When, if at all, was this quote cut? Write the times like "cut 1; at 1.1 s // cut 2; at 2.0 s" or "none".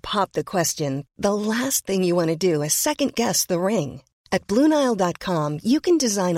none